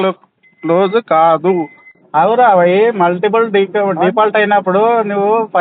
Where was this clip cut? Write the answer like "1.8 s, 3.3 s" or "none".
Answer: 1.8 s